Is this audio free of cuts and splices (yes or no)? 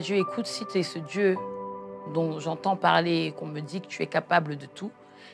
yes